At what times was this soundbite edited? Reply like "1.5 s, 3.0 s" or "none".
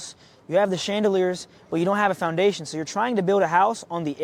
none